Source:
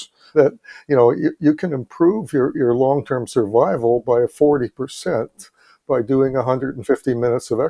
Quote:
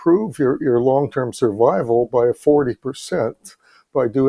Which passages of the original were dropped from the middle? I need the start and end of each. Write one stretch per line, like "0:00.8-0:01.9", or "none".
none